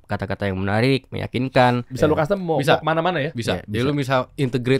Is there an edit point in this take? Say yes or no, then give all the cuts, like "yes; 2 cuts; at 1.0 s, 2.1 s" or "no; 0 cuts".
yes; 1 cut; at 1.9 s